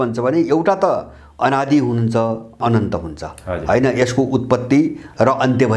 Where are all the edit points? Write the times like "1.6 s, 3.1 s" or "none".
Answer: none